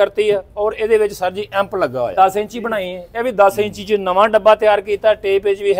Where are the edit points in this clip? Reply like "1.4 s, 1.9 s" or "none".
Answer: 2.1 s